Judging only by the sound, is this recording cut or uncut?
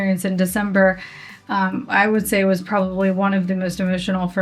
uncut